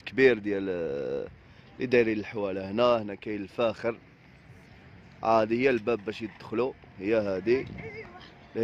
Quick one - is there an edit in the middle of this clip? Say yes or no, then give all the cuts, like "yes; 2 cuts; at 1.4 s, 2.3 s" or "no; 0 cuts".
no; 0 cuts